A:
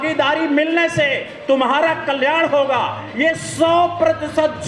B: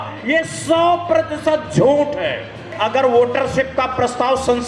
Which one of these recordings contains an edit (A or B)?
B